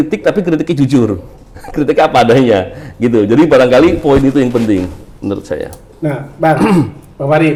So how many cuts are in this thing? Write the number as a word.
zero